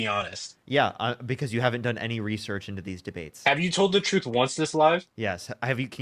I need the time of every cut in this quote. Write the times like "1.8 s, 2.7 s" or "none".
none